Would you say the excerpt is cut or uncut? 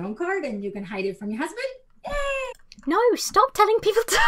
uncut